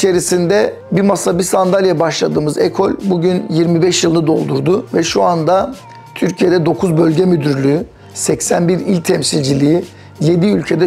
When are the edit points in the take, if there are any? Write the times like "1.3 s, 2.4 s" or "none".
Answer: none